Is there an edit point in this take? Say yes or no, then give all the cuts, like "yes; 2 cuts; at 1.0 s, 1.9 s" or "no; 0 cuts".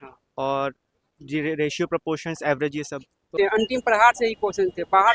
yes; 1 cut; at 3.2 s